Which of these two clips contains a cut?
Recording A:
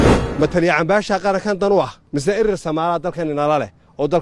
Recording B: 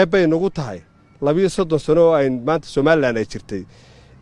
A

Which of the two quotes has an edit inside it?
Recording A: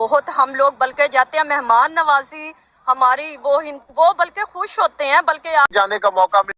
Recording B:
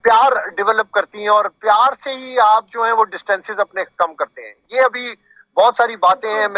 A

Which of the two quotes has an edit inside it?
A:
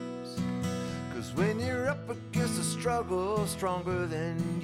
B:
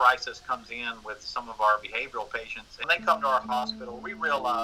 B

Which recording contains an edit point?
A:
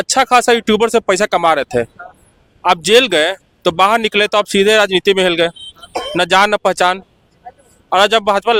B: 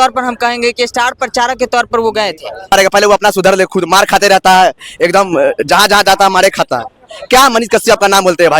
B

